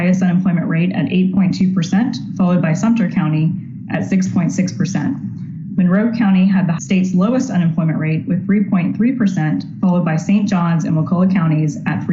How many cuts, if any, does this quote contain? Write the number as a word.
zero